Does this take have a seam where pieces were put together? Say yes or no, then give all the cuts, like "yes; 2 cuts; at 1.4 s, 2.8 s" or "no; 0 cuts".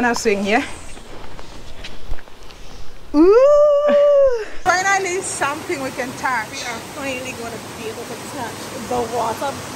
yes; 1 cut; at 4.6 s